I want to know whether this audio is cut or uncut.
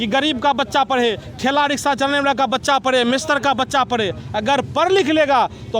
uncut